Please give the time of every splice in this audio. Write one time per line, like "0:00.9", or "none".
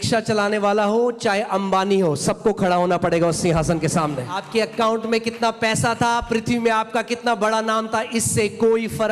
0:04.4